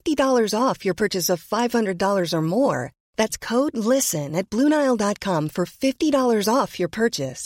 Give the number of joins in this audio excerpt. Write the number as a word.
zero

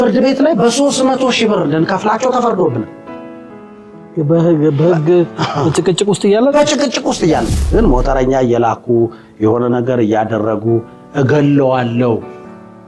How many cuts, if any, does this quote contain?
one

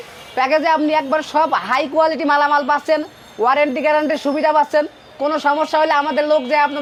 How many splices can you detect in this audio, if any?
zero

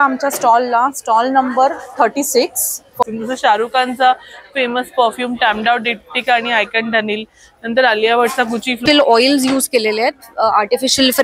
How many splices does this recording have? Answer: two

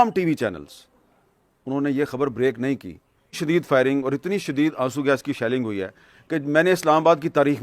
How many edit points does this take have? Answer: one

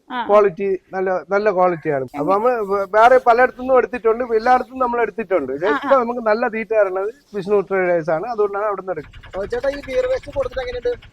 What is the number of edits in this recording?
two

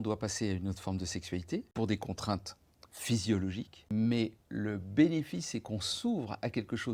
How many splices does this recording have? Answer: two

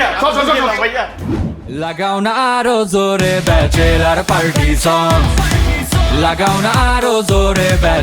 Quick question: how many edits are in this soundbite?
one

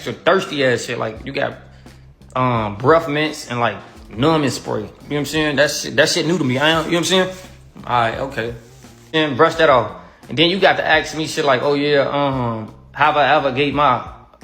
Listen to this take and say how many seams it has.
two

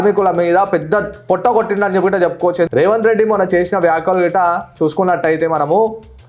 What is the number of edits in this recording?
one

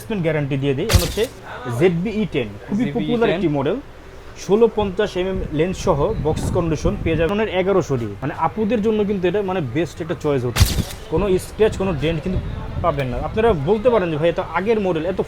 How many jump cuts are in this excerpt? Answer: four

